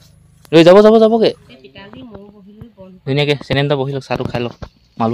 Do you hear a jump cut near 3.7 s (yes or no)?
no